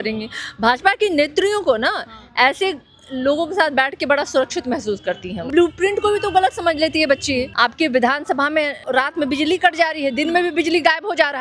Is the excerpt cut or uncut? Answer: cut